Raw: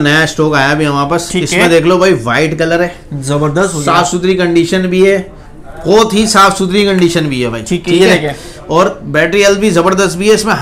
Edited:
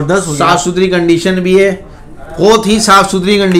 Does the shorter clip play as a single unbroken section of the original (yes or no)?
yes